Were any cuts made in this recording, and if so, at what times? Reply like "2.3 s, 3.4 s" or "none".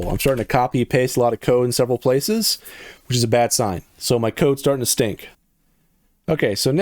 5.3 s